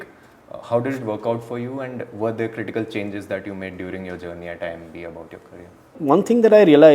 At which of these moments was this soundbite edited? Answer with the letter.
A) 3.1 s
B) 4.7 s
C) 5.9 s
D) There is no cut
C